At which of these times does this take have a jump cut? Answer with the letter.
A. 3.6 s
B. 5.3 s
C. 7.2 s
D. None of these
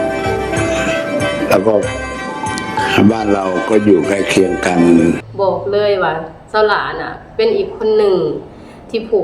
B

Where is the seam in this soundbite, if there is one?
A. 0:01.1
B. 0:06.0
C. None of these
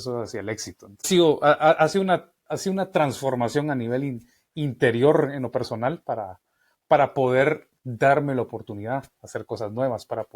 A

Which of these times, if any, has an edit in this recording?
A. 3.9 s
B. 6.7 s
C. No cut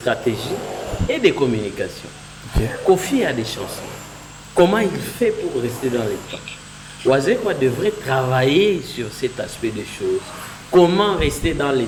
C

